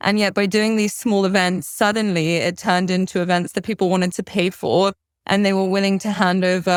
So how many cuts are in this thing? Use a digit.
0